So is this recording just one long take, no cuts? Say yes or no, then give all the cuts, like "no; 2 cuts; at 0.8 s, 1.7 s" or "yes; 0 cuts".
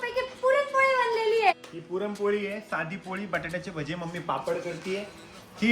no; 1 cut; at 1.5 s